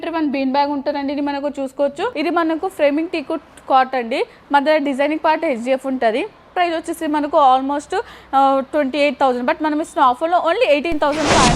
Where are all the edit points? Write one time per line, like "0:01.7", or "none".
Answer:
0:02.1
0:06.5